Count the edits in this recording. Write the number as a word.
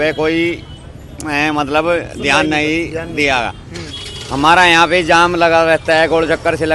zero